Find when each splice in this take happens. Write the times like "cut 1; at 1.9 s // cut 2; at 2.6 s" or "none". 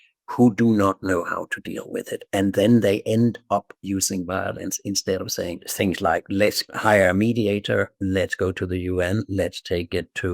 cut 1; at 5.7 s // cut 2; at 6.7 s